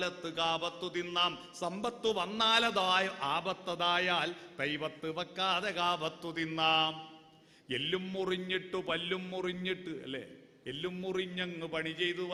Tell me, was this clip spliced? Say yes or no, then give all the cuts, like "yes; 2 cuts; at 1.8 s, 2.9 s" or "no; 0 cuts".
no; 0 cuts